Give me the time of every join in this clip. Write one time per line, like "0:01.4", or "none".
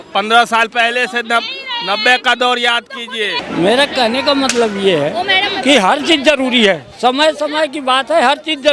0:03.4